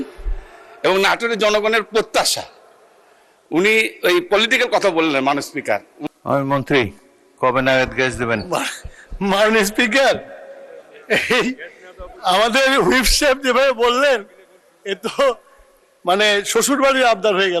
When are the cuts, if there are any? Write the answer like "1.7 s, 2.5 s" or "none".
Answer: 5.9 s